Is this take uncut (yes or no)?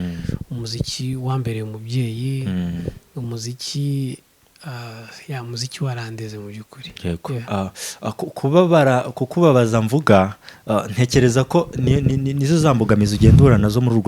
yes